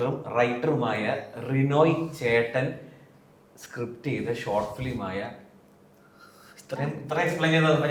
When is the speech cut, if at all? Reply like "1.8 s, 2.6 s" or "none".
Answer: none